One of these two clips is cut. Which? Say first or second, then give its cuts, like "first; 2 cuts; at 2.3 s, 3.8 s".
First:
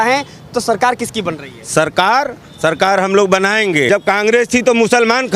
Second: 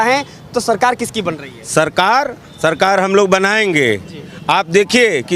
first; 1 cut; at 3.9 s